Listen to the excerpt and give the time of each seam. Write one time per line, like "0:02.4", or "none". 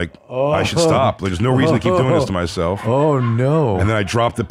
none